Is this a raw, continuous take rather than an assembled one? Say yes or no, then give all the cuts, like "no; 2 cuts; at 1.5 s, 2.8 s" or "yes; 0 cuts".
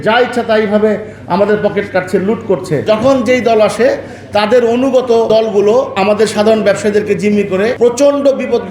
no; 3 cuts; at 2.8 s, 5.7 s, 7.7 s